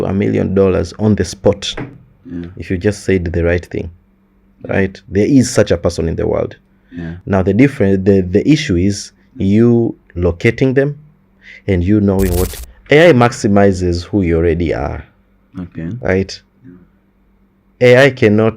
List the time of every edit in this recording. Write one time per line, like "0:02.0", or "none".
0:12.6